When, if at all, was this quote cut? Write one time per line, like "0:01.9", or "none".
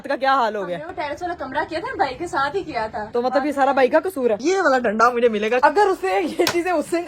0:03.0
0:04.4
0:05.6

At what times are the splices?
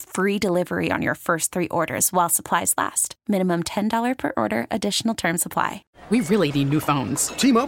0:05.9

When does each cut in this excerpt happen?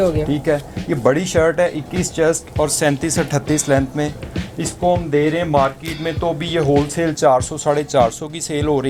none

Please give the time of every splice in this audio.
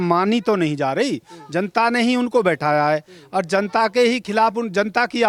none

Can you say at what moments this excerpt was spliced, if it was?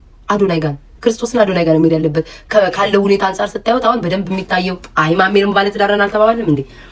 none

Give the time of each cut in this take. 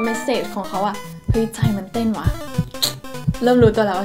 none

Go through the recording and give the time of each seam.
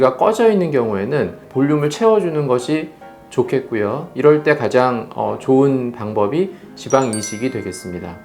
0:01.4

